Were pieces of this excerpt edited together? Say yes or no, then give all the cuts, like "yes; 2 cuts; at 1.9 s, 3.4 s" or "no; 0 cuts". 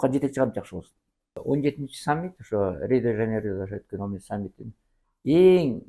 yes; 1 cut; at 1.4 s